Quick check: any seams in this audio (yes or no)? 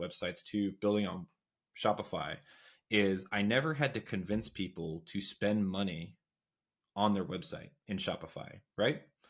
no